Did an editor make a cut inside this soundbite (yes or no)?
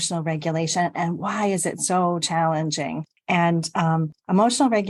no